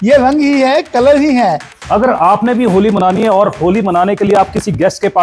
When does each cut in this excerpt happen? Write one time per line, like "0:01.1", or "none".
0:01.7